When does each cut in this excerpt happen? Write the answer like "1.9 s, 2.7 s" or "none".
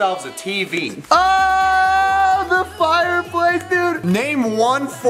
0.9 s